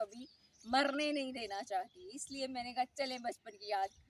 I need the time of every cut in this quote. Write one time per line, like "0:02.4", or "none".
none